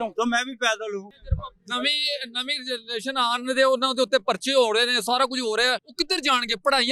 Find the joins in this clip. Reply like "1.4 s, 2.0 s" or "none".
1.1 s, 5.9 s

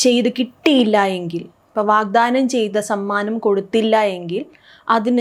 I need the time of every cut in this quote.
none

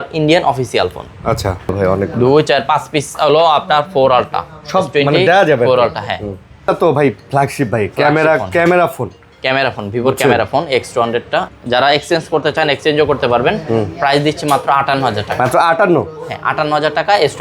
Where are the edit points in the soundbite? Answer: 1.7 s, 6.7 s, 11.5 s

